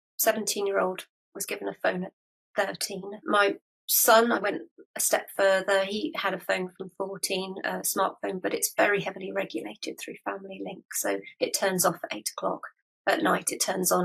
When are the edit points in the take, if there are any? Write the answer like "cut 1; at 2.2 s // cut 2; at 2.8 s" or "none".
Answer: cut 1; at 3.2 s

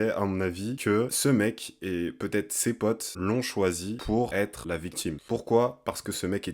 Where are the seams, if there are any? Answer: none

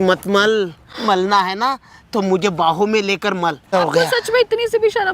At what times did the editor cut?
cut 1; at 3.7 s

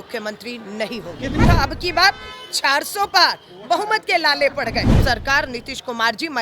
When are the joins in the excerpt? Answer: cut 1; at 1.4 s // cut 2; at 5.0 s

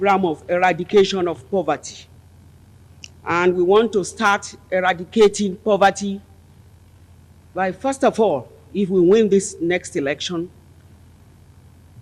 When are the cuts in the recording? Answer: none

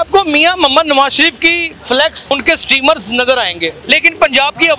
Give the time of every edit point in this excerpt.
cut 1; at 2.3 s // cut 2; at 3.7 s

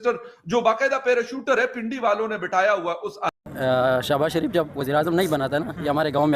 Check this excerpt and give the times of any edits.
cut 1; at 3.3 s

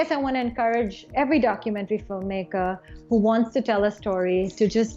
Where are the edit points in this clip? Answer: cut 1; at 1.1 s

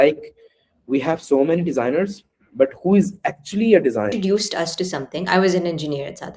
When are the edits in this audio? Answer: cut 1; at 4.1 s

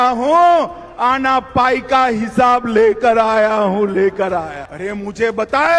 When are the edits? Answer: cut 1; at 4.6 s

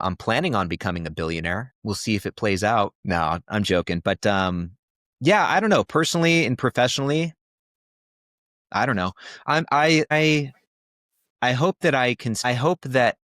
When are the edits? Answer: cut 1; at 1.7 s // cut 2; at 3.0 s // cut 3; at 10.1 s // cut 4; at 12.4 s

